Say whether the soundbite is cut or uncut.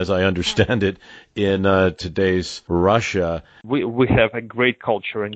cut